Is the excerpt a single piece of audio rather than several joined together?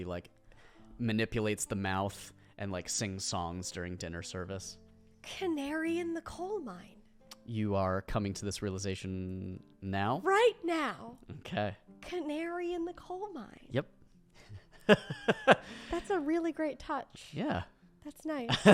yes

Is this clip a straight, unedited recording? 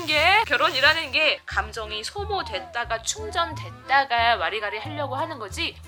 yes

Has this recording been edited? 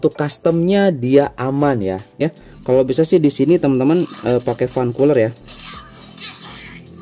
yes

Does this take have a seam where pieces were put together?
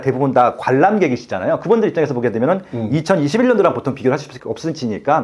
yes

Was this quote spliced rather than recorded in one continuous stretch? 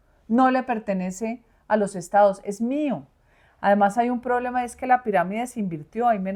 no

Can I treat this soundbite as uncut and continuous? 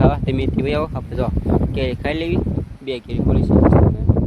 yes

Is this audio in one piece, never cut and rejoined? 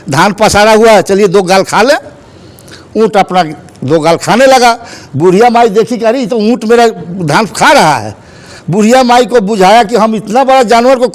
yes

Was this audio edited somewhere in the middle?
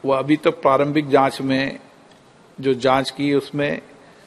no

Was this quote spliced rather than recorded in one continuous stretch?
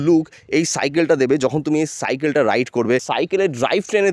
yes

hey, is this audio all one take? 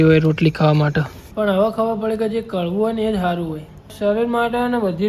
no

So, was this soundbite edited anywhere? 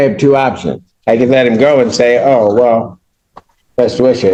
no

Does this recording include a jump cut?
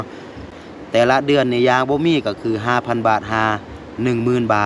yes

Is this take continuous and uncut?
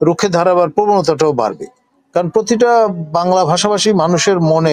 yes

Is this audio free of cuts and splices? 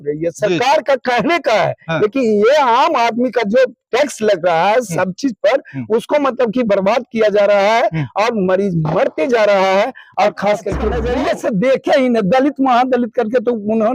no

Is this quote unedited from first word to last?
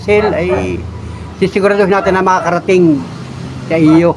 yes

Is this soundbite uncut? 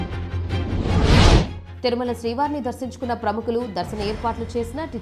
yes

